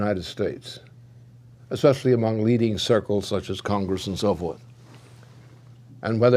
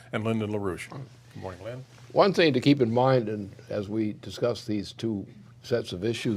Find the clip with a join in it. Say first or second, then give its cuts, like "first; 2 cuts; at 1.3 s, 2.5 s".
first; 1 cut; at 4.3 s